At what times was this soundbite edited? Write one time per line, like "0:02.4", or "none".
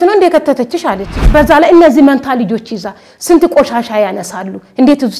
0:01.1